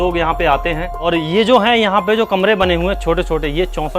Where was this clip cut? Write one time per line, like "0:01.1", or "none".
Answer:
0:01.1

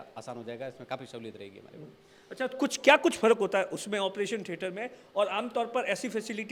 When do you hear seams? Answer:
none

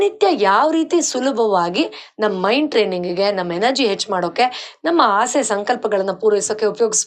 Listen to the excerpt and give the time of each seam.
none

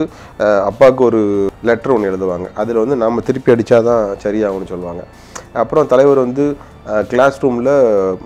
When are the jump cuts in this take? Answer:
0:01.5

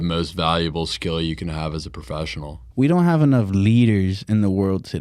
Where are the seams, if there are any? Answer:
0:02.6

